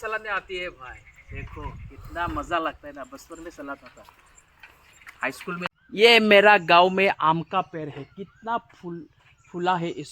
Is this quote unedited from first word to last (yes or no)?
no